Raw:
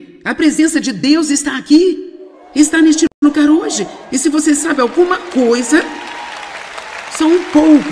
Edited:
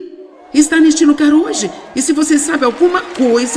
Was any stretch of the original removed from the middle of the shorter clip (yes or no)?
yes